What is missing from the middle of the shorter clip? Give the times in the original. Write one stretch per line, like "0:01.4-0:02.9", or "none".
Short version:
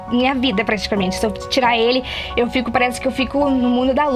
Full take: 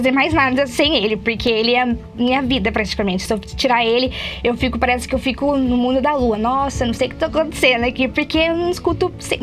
none